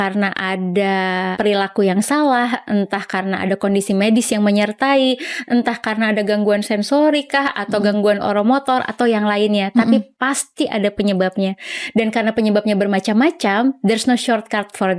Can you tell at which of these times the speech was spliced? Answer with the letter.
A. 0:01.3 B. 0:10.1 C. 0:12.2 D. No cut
A